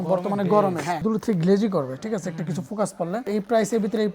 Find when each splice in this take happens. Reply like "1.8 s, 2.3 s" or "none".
1.0 s, 3.2 s